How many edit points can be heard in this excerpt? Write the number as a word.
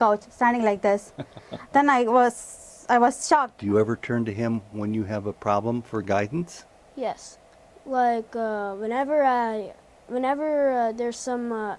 one